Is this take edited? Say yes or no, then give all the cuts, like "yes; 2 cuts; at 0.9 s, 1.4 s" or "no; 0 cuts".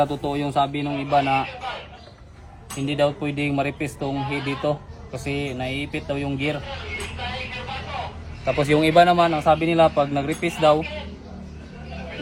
no; 0 cuts